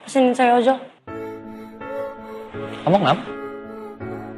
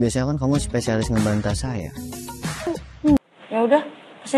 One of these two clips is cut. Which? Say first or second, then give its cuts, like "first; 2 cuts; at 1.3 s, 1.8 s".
second; 1 cut; at 3.2 s